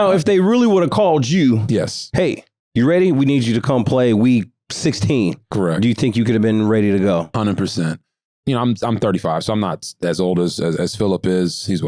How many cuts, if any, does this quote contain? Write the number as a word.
one